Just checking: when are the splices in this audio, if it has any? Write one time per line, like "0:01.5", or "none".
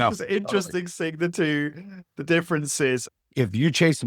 0:03.1